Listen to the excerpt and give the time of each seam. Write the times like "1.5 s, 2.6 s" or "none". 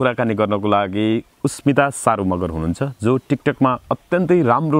none